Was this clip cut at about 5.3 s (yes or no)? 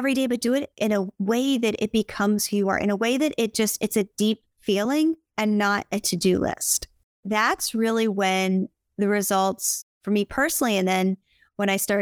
yes